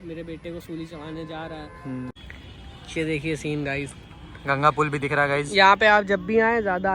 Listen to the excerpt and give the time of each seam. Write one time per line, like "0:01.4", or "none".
0:02.2